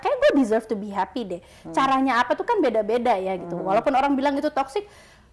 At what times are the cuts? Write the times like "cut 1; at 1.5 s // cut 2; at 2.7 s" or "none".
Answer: none